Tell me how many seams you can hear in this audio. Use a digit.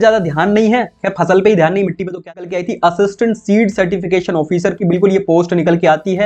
1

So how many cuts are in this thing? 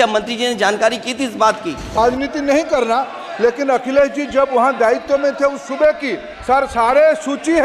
1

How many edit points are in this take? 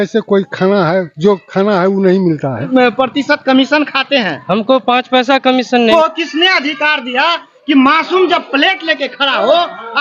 2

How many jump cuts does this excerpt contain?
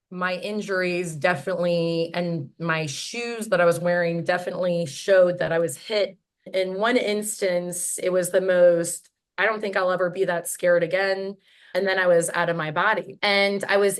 3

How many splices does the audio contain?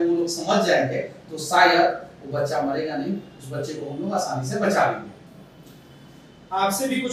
0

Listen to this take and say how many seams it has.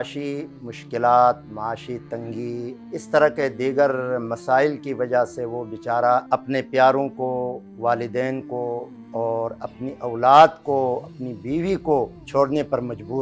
3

